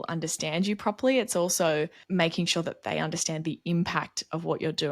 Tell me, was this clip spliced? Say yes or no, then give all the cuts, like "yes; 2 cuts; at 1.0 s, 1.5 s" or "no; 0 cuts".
yes; 1 cut; at 2.0 s